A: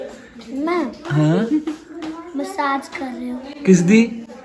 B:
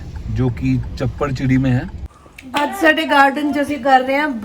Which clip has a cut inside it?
B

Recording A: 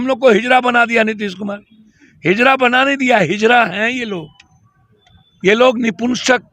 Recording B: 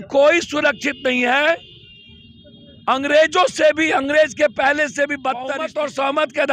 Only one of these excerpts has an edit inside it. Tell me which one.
B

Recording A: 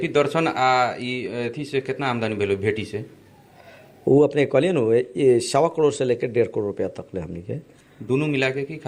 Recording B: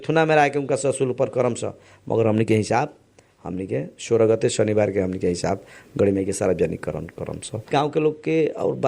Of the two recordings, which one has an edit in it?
B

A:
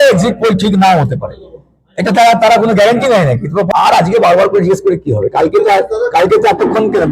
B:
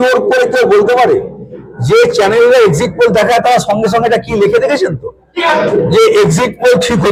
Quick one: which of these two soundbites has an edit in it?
A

